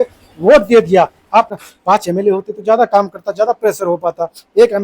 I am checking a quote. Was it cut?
yes; 1 cut; at 1.6 s

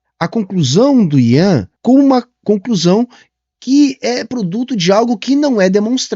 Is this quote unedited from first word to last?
no; 1 cut; at 1.7 s

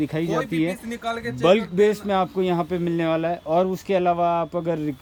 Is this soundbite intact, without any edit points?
yes; 0 cuts

